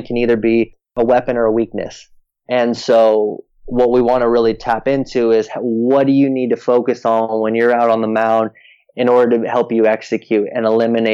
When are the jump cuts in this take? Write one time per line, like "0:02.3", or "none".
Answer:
0:01.0